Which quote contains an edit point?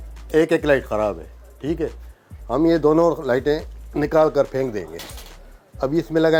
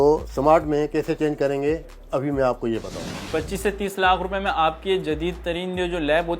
second; 1 cut; at 3.1 s

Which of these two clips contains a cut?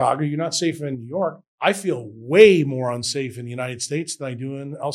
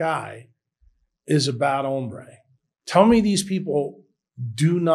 first; 1 cut; at 1.4 s

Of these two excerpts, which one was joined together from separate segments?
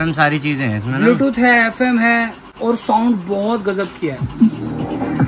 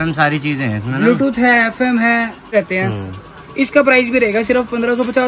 second; 1 cut; at 2.5 s

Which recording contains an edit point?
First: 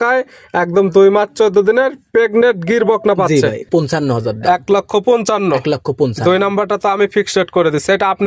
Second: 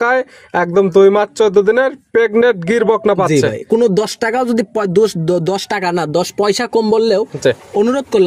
first; 1 cut; at 3.6 s

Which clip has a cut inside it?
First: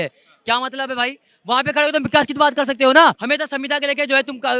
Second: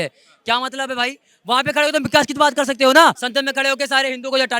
second; 1 cut; at 3.2 s

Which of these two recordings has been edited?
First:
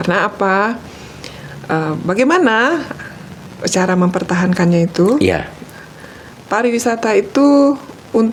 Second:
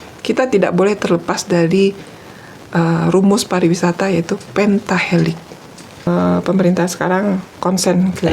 second; 1 cut; at 6.1 s

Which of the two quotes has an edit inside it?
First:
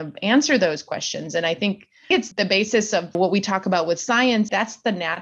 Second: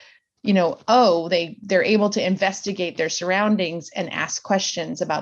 first; 3 cuts; at 2.1 s, 3.2 s, 4.5 s

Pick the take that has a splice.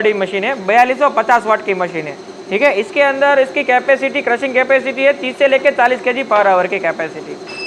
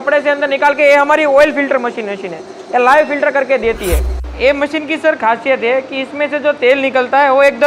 second; 1 cut; at 4.1 s

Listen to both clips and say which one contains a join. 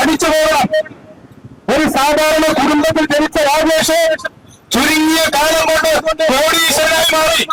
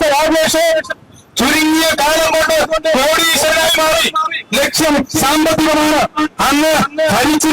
second; 1 cut; at 6.4 s

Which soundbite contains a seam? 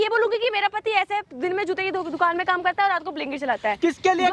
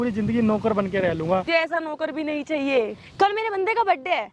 second; 2 cuts; at 1.5 s, 2.9 s

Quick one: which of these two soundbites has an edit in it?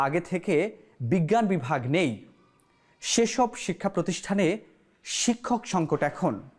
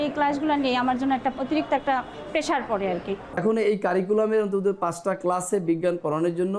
second; 2 cuts; at 1.4 s, 3.3 s

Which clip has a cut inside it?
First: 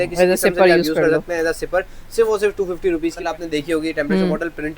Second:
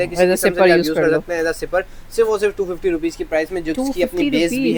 first; 1 cut; at 3.2 s

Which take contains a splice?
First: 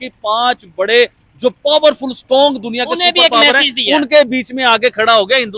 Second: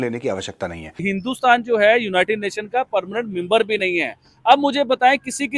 second; 1 cut; at 1.0 s

